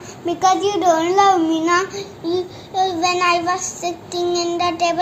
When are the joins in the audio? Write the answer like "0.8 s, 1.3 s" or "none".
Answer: none